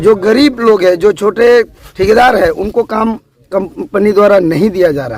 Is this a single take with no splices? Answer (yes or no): no